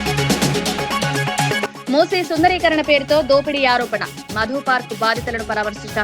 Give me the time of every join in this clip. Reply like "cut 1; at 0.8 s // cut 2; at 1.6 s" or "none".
cut 1; at 1.2 s

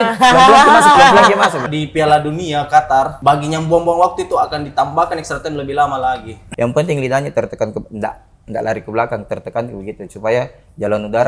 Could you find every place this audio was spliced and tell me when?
cut 1; at 1.7 s // cut 2; at 3.1 s // cut 3; at 6.4 s

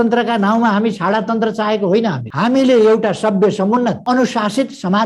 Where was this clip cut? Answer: cut 1; at 4.0 s

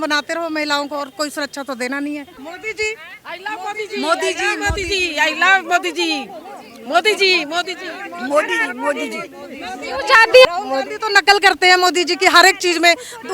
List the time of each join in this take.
cut 1; at 2.4 s // cut 2; at 10.5 s

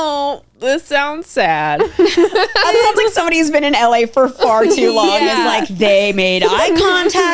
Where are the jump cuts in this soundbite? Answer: cut 1; at 2.7 s

